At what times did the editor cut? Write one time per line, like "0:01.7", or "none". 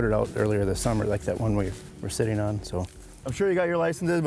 0:03.3